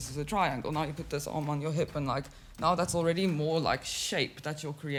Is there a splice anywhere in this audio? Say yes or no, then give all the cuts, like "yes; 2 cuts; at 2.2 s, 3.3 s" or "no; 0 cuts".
no; 0 cuts